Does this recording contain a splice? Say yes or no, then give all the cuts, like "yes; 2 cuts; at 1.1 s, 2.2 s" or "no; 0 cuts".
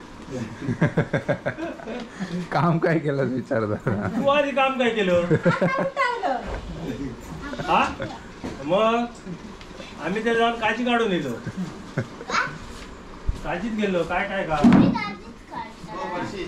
no; 0 cuts